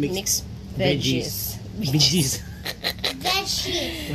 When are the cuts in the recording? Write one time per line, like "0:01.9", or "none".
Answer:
none